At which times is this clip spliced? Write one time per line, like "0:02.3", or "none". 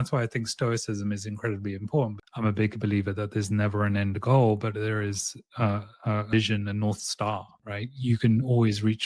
0:02.2